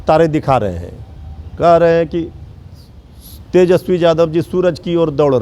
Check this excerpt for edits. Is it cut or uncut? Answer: uncut